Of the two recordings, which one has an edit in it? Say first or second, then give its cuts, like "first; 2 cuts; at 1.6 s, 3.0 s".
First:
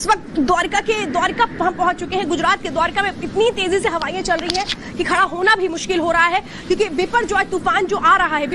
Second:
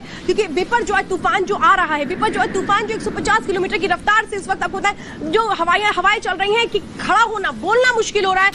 first; 1 cut; at 4.8 s